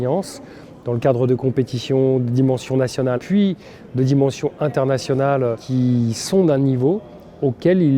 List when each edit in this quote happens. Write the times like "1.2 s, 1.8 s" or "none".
3.2 s, 5.6 s

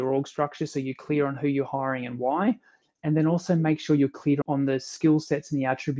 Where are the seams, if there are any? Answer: 4.4 s

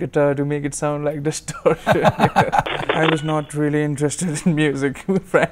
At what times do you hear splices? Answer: 2.8 s

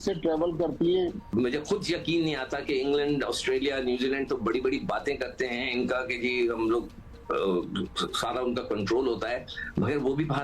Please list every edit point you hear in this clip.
1.2 s

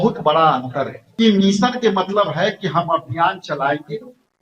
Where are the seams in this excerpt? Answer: 1.0 s

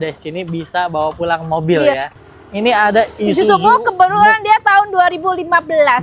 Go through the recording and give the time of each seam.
2.1 s

